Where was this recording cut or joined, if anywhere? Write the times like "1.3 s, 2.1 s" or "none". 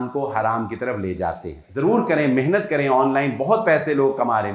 1.6 s